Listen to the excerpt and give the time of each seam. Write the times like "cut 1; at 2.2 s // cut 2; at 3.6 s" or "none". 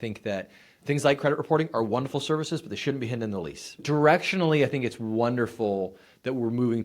cut 1; at 3.8 s